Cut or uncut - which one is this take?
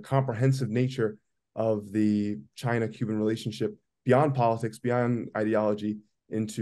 uncut